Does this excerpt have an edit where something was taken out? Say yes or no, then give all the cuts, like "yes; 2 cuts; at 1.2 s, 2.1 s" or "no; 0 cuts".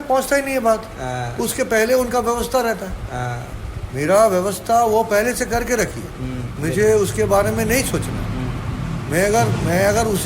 no; 0 cuts